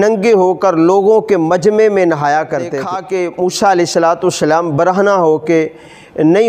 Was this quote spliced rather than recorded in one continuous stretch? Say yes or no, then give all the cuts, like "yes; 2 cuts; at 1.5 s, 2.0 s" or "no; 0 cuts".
yes; 1 cut; at 2.9 s